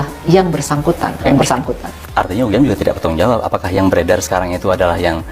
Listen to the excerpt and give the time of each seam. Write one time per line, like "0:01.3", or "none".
0:01.3